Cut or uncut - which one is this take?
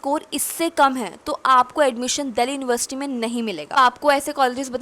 cut